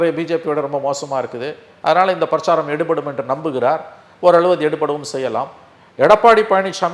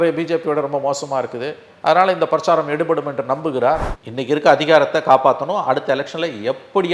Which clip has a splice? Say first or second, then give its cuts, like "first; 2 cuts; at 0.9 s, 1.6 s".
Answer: second; 1 cut; at 4.0 s